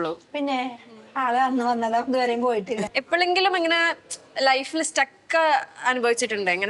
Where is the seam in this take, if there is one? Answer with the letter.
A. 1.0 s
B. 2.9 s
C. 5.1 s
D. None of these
B